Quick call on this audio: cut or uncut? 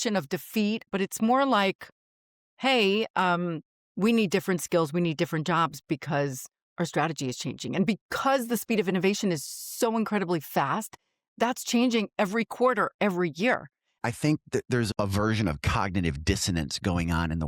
cut